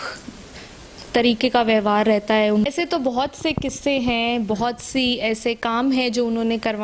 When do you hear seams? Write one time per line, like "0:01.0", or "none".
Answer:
0:02.7

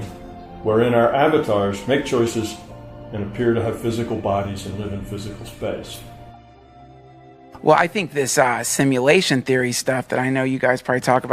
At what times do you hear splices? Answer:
none

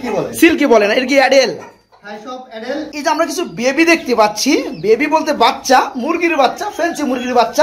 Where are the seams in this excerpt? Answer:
0:02.9

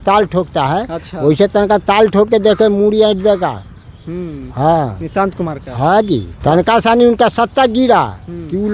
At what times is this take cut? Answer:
0:06.3

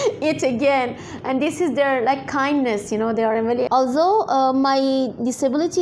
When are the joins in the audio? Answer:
0:03.7

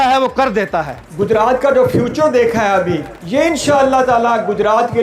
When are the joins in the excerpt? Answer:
0:01.0
0:03.1

